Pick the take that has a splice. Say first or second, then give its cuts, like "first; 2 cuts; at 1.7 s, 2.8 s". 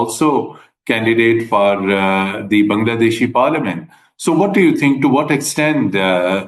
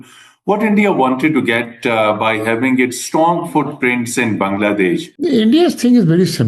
second; 1 cut; at 5.1 s